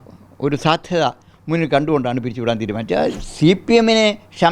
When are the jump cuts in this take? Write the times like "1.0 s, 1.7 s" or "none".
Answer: 3.2 s